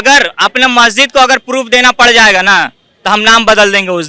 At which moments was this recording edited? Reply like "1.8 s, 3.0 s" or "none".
none